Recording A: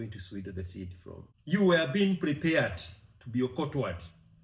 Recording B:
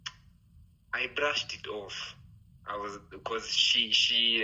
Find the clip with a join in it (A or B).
A